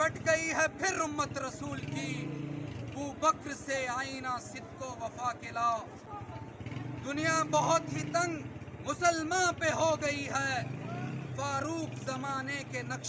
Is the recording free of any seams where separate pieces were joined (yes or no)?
yes